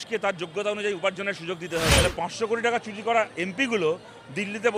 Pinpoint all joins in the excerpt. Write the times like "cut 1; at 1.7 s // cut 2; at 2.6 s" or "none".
cut 1; at 2.0 s